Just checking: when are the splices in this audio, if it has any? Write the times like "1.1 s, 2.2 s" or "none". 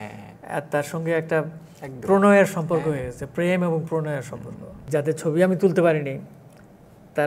4.8 s